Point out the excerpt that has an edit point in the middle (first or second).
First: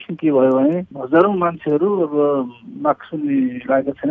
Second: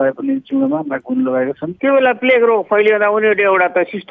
second